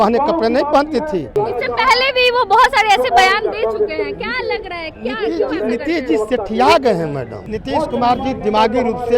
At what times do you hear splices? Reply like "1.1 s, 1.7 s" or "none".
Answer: 1.3 s, 7.4 s

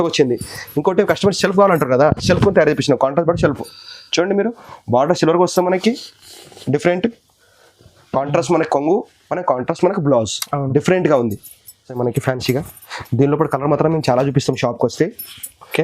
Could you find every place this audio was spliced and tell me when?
12.0 s

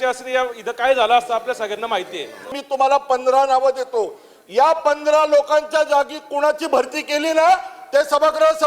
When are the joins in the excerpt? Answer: 2.5 s

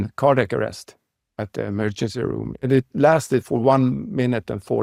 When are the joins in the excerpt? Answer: none

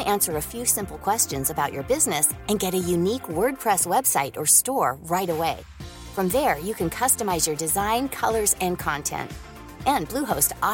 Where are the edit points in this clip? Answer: none

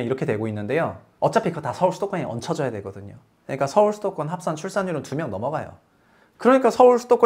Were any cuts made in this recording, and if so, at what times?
1.0 s

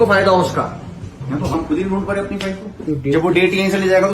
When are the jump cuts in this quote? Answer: 1.5 s, 2.9 s

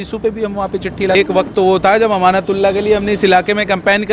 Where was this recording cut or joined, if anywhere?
1.1 s

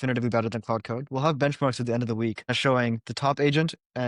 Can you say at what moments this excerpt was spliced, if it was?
2.6 s

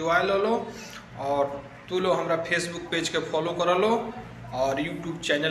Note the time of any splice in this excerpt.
4.4 s

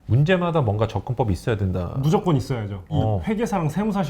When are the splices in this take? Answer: 3.0 s

